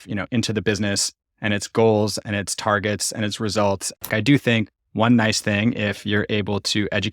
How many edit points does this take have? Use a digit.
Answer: 1